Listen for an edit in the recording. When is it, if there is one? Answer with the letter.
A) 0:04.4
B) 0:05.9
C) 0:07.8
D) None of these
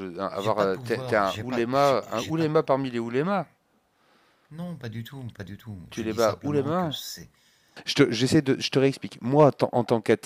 C